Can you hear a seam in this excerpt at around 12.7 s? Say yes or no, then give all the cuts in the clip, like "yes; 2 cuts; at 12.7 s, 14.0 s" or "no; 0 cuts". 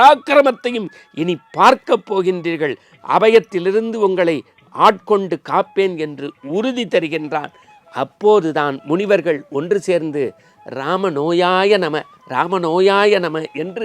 no; 0 cuts